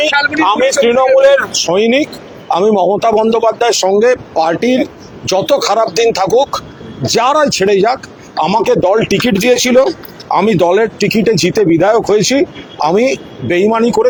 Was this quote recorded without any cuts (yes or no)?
yes